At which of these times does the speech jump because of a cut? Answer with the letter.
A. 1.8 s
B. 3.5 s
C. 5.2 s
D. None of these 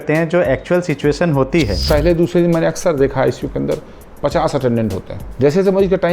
A